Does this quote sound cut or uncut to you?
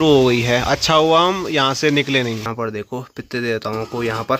cut